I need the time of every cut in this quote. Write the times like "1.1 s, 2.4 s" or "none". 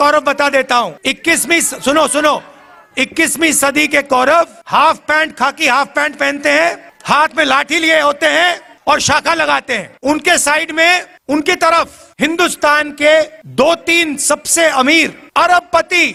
none